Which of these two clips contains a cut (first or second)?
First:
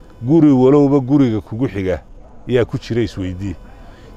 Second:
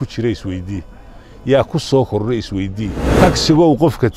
second